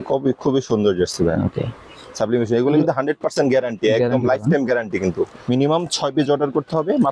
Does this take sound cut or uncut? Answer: cut